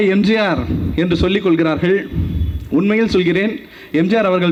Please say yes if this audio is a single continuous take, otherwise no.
yes